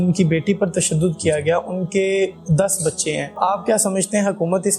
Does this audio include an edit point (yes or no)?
no